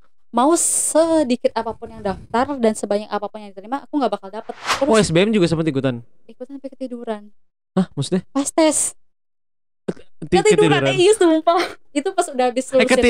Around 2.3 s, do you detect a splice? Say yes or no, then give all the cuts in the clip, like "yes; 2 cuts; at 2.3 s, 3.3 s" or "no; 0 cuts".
no; 1 cut; at 4.6 s